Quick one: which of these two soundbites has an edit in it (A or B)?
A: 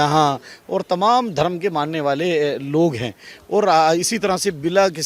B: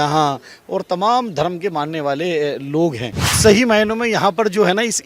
B